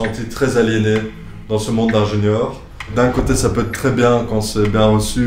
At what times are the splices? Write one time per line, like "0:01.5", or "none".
0:02.9